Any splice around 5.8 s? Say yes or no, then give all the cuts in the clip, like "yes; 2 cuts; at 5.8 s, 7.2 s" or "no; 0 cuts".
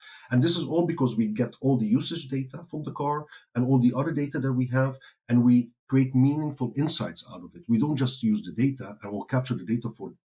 yes; 1 cut; at 5.8 s